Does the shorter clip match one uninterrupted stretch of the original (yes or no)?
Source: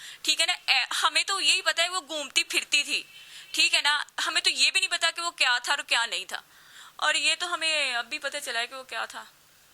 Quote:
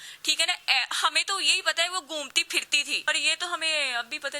no